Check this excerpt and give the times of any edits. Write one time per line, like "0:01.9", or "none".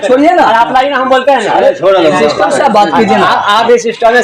none